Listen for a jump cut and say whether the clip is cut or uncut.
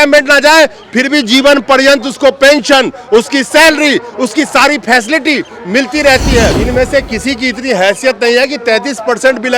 cut